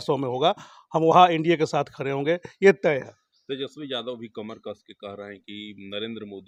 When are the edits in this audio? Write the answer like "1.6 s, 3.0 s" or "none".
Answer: none